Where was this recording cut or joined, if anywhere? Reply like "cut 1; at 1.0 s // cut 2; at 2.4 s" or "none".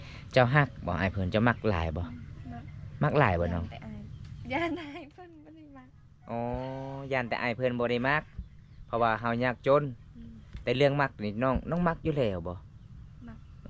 none